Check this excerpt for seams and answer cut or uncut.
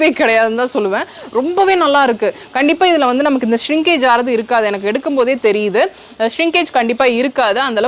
uncut